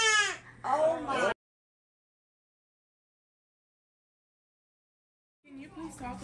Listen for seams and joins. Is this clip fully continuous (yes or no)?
yes